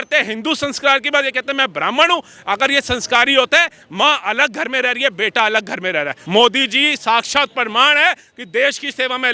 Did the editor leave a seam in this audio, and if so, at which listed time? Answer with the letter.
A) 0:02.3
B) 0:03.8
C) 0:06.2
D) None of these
C